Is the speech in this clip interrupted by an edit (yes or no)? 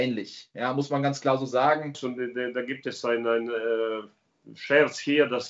yes